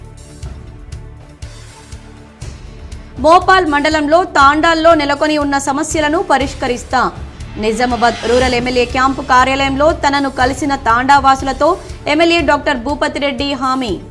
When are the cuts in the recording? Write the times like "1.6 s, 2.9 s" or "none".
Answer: 1.1 s